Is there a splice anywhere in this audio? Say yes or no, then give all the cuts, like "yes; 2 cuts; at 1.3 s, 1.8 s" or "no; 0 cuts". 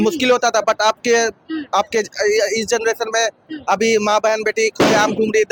no; 0 cuts